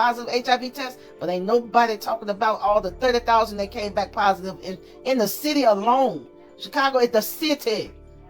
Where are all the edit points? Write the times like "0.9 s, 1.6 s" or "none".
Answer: none